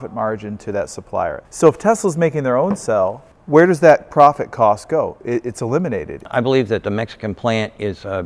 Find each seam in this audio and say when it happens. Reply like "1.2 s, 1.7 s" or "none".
1.4 s, 6.2 s

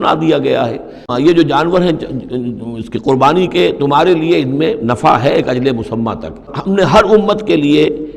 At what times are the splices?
1.1 s, 6.5 s

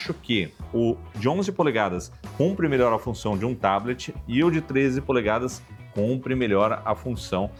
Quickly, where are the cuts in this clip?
none

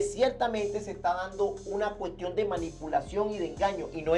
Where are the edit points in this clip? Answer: none

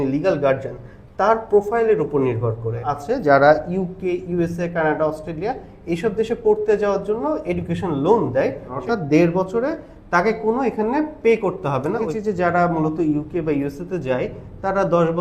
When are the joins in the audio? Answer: 2.9 s, 8.8 s, 12.0 s

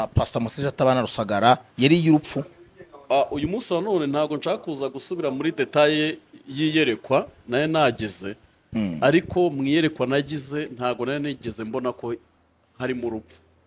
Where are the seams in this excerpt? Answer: none

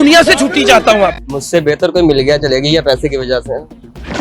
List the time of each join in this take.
1.3 s

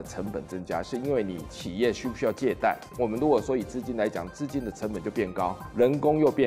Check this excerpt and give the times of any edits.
2.9 s, 5.6 s

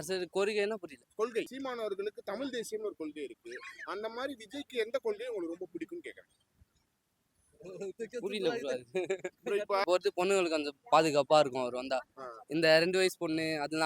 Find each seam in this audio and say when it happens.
1.5 s, 9.8 s

